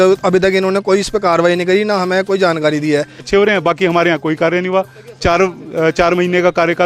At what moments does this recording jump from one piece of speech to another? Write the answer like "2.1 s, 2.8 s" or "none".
3.3 s